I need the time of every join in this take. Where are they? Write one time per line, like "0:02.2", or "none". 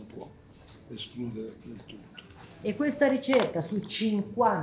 0:02.4